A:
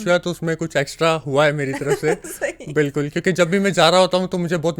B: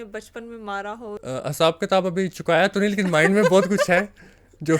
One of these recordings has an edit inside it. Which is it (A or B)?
B